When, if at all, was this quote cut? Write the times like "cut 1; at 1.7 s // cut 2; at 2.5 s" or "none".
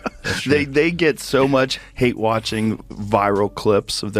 cut 1; at 1.8 s